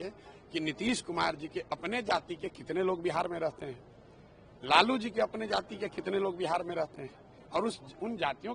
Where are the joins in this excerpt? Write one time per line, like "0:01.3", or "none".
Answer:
none